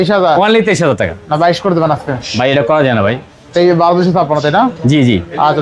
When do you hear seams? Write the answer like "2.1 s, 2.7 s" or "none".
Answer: none